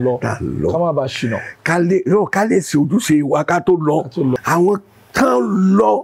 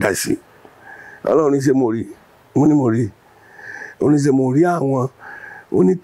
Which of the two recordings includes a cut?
first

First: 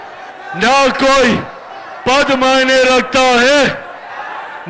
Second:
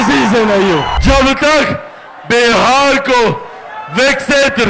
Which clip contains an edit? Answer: second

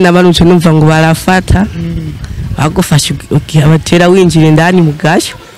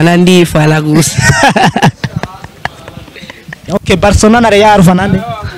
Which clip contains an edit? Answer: second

